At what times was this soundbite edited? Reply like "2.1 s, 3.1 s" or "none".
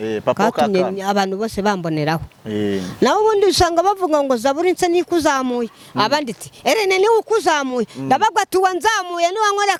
none